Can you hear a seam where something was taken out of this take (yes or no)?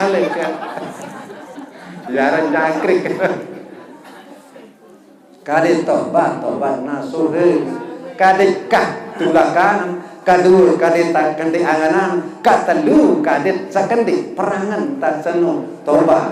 no